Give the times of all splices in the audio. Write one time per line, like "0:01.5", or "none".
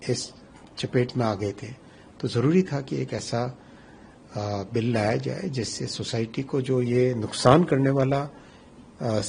none